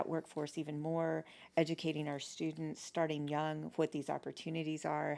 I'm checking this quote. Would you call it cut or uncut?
uncut